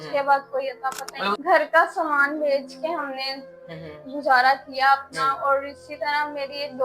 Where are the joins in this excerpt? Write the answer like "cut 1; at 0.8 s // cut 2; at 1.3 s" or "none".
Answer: cut 1; at 1.4 s